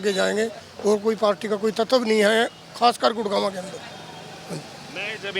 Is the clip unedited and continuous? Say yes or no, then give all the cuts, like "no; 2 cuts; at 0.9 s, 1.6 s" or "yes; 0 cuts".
yes; 0 cuts